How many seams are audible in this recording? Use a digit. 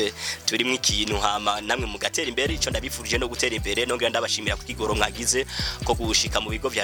0